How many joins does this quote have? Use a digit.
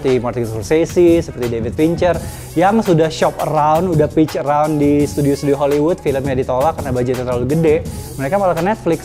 0